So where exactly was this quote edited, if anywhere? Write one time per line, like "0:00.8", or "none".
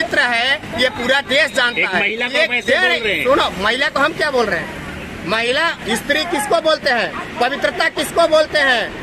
none

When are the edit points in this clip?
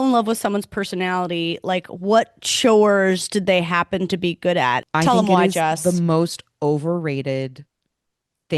0:04.8

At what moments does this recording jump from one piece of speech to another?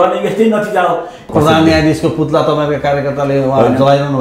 0:01.3

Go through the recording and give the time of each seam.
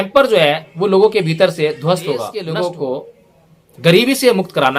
0:02.3

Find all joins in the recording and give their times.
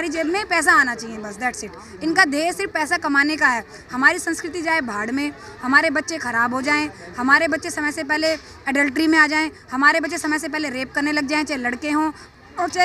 none

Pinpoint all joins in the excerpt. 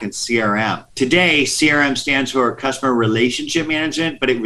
none

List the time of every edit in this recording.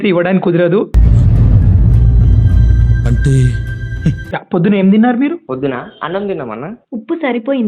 0:04.2

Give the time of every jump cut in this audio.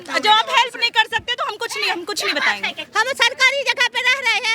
0:02.8

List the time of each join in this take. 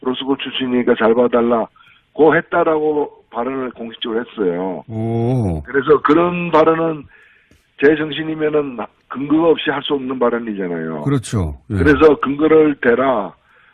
0:06.1

